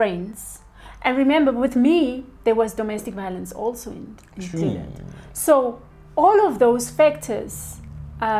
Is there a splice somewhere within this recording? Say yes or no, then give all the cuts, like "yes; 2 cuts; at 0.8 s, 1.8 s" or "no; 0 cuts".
yes; 1 cut; at 4.5 s